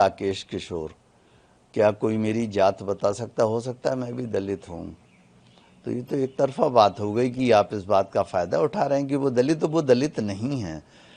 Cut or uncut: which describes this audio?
uncut